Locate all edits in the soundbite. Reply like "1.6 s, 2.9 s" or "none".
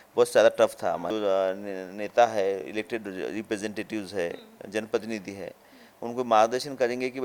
1.1 s